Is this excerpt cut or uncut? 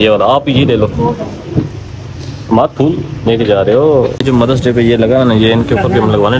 cut